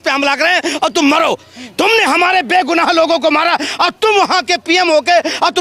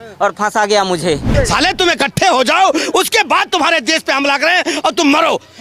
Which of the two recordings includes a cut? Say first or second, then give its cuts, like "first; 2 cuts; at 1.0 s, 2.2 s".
second; 1 cut; at 1.3 s